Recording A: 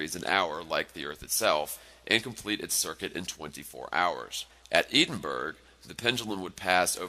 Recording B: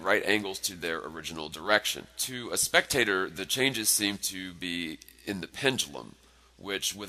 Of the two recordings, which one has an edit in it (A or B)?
B